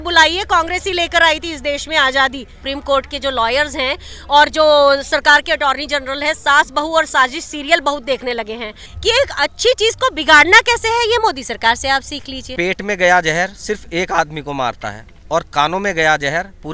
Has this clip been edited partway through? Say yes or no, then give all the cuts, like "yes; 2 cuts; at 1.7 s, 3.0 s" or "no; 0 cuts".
yes; 3 cuts; at 2.6 s, 8.8 s, 12.4 s